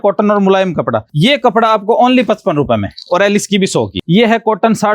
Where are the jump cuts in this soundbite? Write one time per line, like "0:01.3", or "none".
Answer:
0:01.1
0:04.0